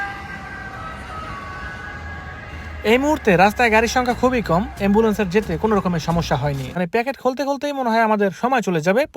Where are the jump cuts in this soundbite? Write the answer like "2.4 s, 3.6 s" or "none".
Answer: 6.7 s